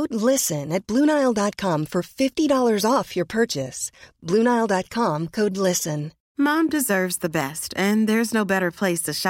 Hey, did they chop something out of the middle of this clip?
yes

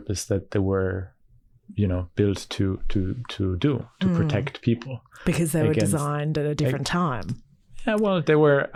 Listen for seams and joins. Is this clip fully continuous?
yes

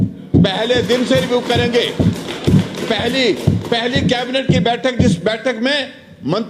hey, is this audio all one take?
yes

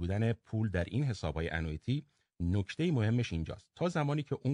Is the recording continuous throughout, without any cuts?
yes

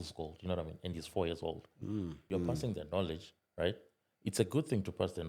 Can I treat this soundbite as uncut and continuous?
no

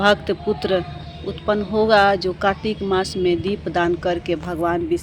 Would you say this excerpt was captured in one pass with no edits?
yes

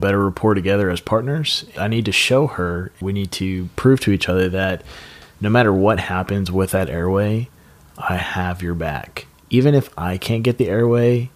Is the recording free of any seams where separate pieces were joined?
no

